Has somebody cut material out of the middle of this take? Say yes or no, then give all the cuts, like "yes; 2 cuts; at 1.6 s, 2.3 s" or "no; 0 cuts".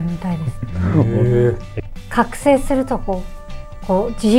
yes; 1 cut; at 1.7 s